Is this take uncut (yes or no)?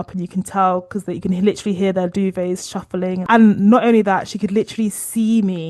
no